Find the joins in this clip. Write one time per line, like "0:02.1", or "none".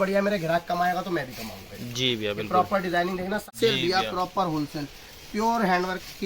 0:03.5